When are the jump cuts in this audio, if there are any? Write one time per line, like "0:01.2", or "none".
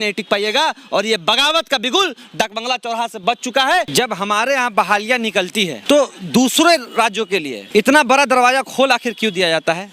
0:03.9
0:05.8
0:07.6